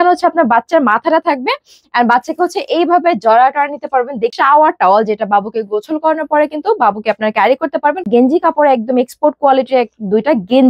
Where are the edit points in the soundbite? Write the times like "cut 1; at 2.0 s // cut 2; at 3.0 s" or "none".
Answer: cut 1; at 4.3 s // cut 2; at 8.1 s